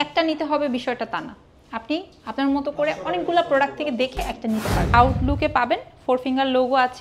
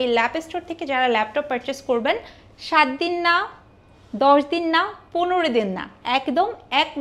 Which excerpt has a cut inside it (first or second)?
first